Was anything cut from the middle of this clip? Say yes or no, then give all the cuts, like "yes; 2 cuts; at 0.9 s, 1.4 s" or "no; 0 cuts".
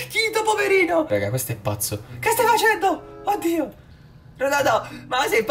yes; 1 cut; at 1.1 s